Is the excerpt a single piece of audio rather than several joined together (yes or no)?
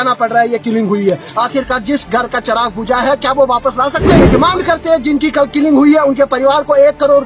no